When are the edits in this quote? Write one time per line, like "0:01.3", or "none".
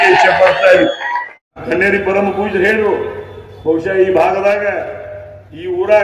0:01.6